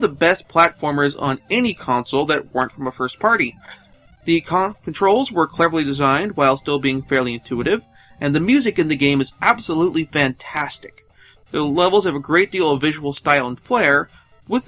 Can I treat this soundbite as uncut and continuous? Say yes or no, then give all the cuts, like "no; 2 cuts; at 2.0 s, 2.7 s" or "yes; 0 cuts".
yes; 0 cuts